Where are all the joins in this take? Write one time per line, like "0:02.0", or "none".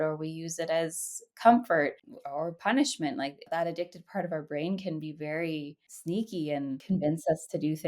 0:06.8